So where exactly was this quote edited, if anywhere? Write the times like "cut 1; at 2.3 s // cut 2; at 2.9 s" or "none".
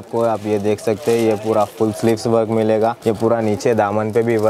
cut 1; at 3.0 s